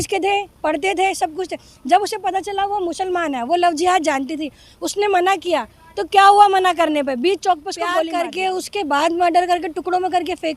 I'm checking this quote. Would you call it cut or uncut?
cut